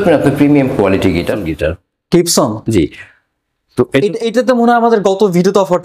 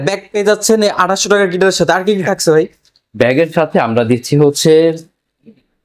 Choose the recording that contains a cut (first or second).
first